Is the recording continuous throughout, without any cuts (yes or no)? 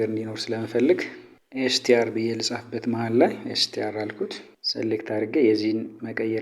yes